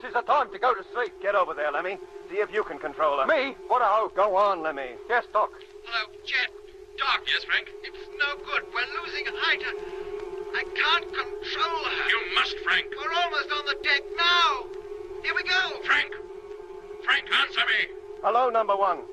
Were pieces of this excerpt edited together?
no; 0 cuts

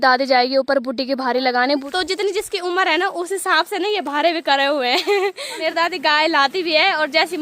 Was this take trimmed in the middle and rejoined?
yes; 2 cuts; at 1.9 s, 5.6 s

